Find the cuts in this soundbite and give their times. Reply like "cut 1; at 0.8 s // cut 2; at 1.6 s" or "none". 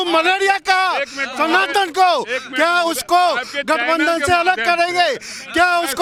none